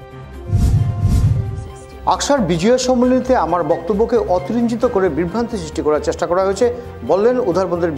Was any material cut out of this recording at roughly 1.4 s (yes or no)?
yes